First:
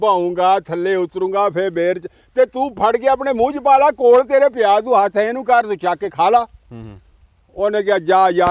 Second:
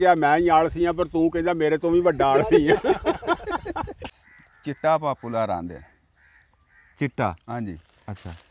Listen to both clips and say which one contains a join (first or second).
second